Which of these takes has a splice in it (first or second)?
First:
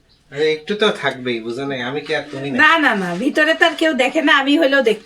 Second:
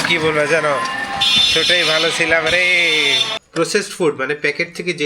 second